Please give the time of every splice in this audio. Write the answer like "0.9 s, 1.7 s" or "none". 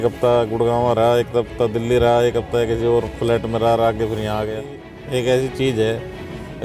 4.8 s